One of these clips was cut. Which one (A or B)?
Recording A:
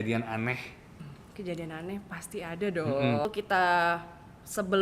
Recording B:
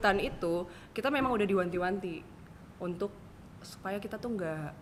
A